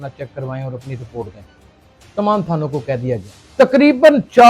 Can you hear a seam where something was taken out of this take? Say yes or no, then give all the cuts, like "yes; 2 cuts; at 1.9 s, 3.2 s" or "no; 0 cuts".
yes; 1 cut; at 3.4 s